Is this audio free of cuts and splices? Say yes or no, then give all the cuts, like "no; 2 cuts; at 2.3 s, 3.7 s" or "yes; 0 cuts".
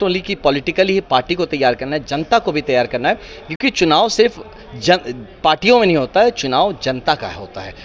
yes; 0 cuts